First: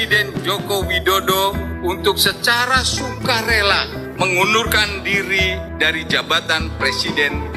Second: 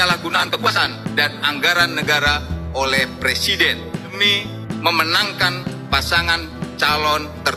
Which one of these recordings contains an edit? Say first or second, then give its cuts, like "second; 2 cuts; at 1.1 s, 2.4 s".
second; 1 cut; at 4.1 s